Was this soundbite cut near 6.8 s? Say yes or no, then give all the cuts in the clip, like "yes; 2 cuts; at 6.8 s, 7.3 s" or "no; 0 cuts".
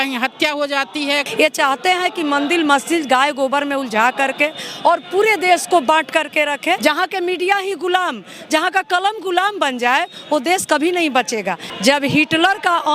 yes; 3 cuts; at 1.3 s, 6.8 s, 11.7 s